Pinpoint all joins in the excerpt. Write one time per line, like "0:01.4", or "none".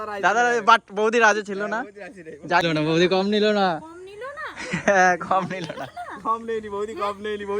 0:02.6